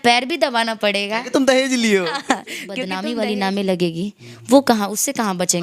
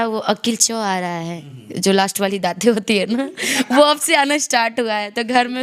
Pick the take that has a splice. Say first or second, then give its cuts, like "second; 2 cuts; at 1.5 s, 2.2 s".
first; 1 cut; at 2.9 s